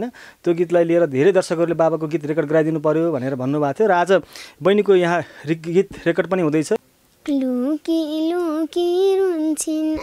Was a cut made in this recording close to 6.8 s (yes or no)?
yes